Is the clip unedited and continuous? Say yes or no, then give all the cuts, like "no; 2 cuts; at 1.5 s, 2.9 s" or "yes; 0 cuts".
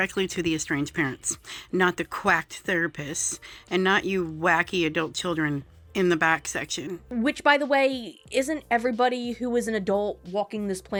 yes; 0 cuts